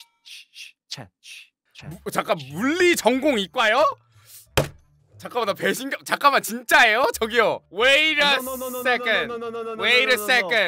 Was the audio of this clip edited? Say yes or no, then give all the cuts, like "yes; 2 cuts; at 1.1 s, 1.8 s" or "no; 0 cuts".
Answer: no; 0 cuts